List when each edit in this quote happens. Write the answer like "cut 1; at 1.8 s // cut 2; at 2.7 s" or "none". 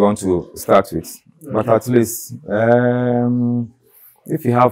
none